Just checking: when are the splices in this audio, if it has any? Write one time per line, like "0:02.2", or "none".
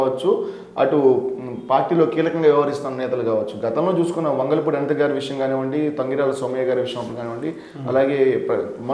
none